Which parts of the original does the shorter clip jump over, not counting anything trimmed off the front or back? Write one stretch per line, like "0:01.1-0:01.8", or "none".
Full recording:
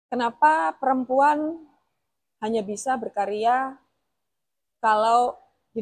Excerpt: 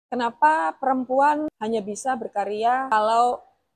0:01.5-0:02.4
0:03.7-0:04.9

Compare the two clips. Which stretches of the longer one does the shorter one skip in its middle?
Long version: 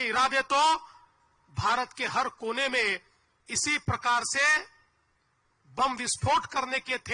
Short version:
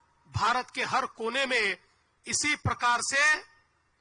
none

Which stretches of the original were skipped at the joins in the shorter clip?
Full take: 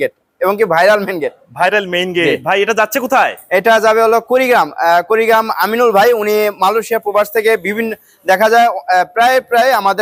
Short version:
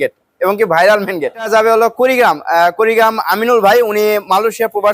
0:01.5-0:03.8

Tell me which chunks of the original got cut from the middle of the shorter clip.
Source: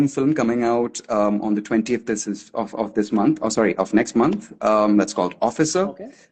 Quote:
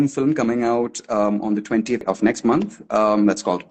0:02.0-0:03.7

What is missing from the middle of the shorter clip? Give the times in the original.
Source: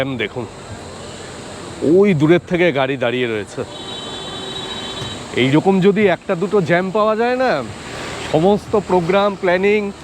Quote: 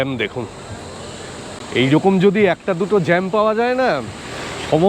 0:01.6-0:05.2

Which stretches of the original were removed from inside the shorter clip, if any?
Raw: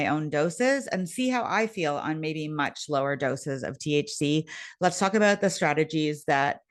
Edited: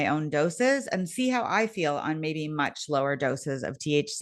none

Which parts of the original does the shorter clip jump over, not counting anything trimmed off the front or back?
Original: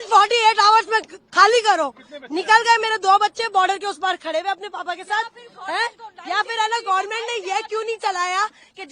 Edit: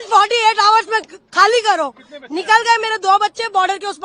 none

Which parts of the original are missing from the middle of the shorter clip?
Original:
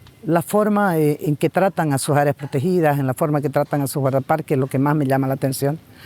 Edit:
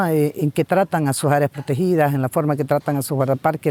none

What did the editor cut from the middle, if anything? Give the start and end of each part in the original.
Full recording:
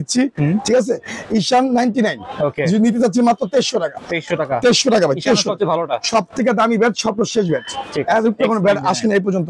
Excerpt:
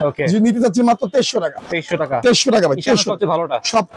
none

